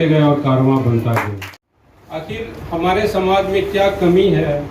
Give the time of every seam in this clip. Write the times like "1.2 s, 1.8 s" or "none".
1.3 s